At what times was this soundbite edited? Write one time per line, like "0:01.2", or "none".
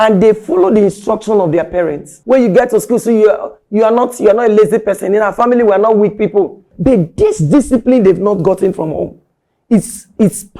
0:02.1
0:06.7